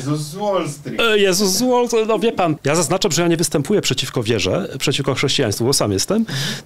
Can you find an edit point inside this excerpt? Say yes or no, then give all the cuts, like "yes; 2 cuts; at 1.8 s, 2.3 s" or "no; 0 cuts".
yes; 1 cut; at 2.6 s